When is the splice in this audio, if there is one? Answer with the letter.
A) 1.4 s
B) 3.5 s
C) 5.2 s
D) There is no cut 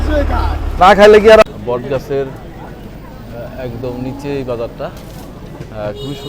A